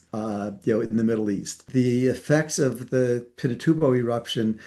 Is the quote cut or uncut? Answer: cut